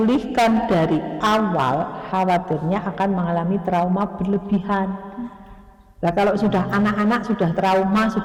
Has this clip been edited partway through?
no; 0 cuts

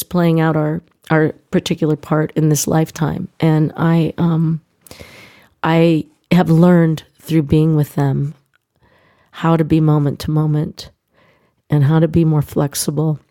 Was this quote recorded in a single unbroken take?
yes; 0 cuts

